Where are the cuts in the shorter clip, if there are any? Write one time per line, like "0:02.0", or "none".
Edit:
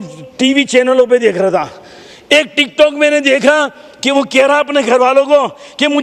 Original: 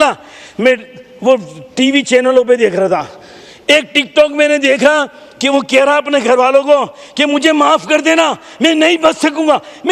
none